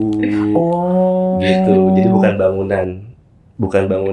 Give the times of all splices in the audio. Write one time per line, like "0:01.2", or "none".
none